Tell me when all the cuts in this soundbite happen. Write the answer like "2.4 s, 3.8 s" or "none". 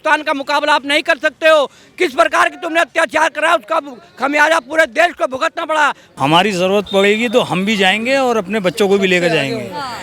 6.1 s